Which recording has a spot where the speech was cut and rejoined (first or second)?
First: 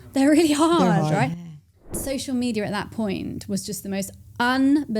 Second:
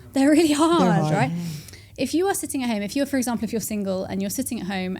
first